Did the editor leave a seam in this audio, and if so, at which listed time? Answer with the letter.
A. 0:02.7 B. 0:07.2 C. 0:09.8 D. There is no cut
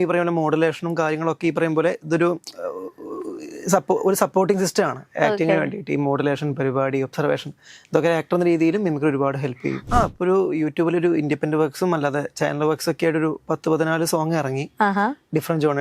C